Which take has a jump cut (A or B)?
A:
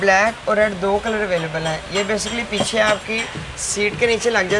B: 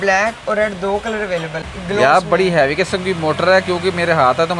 B